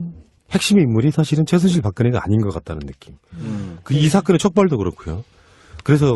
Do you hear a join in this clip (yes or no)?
no